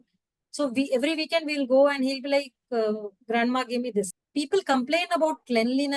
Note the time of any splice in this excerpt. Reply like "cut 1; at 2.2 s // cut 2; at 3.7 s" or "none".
cut 1; at 4.1 s